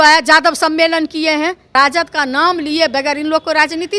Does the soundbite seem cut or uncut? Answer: cut